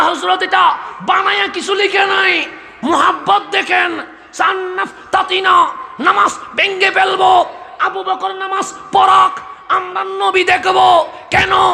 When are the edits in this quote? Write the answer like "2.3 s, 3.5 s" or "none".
none